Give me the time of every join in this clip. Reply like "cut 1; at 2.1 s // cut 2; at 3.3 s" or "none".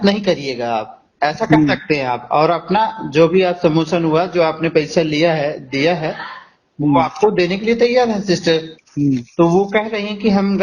cut 1; at 8.8 s